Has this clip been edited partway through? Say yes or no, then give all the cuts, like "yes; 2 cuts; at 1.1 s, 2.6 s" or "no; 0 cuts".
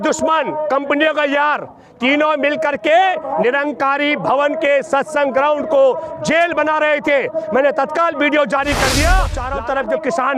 yes; 1 cut; at 9.4 s